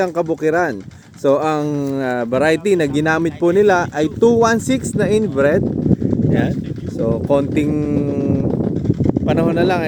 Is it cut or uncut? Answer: uncut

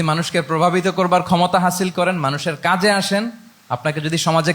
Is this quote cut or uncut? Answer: uncut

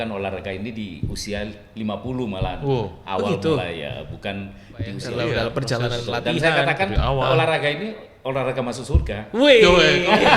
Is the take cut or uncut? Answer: cut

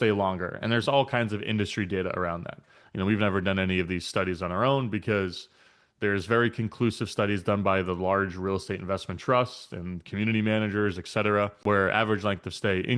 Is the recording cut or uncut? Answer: cut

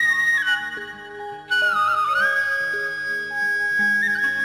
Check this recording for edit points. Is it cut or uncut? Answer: uncut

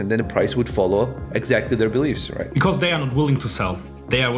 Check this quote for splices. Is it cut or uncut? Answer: uncut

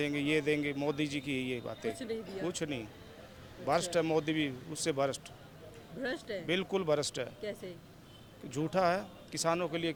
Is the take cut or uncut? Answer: uncut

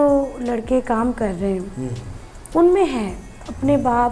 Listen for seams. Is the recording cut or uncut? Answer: uncut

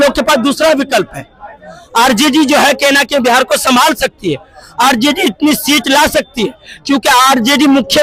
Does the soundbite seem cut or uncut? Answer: uncut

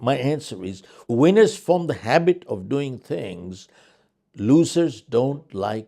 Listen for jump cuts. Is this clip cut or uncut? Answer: uncut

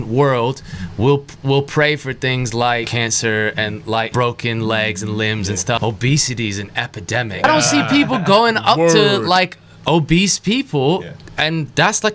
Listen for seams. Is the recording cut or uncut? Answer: cut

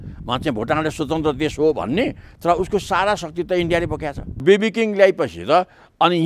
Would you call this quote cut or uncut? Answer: cut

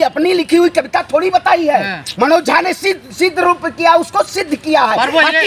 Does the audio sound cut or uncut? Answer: uncut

